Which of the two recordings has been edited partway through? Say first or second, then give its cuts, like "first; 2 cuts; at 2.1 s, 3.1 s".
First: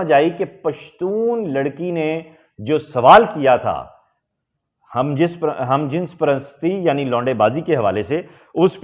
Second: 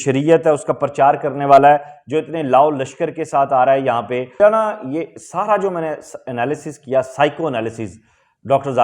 second; 1 cut; at 4.4 s